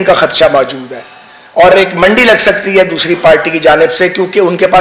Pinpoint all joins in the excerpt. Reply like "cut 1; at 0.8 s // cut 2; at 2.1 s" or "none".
none